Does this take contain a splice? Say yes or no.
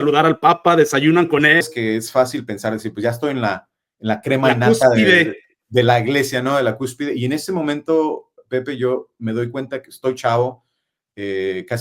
yes